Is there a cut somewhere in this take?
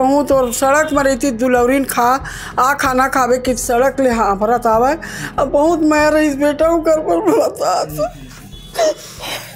no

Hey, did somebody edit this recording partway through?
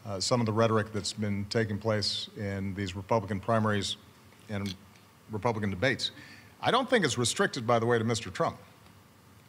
no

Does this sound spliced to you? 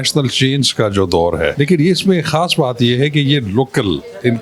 yes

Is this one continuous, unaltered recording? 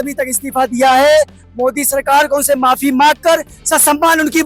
yes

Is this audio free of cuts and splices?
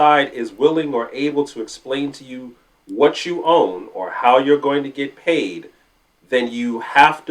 yes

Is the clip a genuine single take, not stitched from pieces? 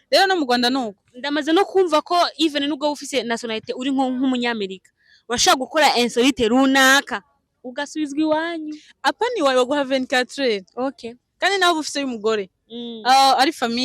yes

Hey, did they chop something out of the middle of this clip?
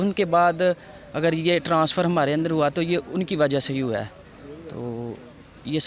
no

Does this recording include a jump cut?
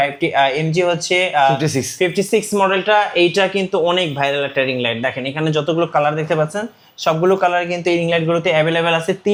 no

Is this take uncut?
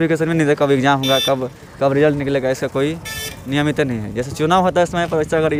yes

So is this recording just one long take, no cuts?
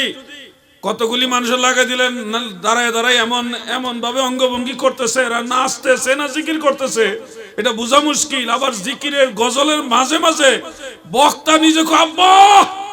yes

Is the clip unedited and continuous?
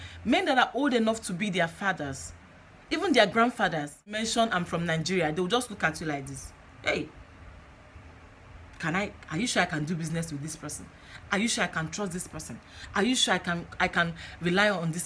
no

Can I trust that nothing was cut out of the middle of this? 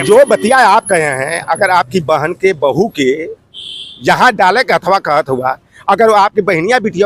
yes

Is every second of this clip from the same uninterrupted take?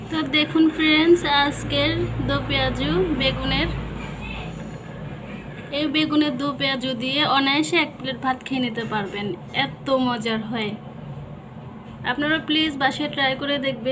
yes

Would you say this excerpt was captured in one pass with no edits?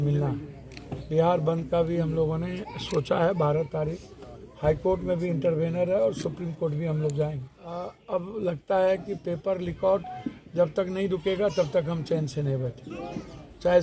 no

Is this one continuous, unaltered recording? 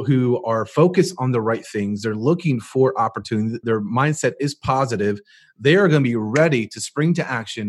no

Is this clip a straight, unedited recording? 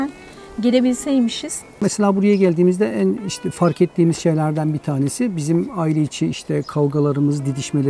no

